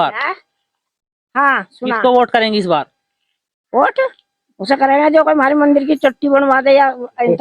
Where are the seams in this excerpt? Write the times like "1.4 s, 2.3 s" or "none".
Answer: none